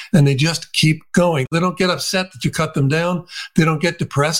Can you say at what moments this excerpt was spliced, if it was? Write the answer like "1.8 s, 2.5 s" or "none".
1.5 s